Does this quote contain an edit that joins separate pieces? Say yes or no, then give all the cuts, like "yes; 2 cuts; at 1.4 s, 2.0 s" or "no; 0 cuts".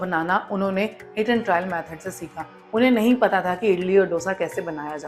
no; 0 cuts